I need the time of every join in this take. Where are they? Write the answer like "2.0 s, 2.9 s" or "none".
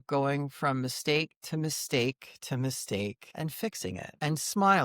3.5 s